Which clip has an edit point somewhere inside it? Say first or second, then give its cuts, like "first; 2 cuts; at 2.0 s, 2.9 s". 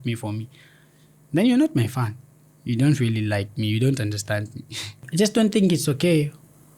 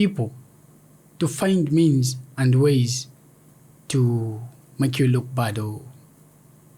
first; 1 cut; at 5.0 s